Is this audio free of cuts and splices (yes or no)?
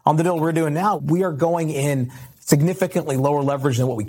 no